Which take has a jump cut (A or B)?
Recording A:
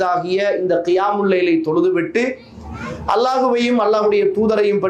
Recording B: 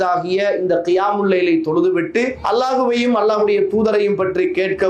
B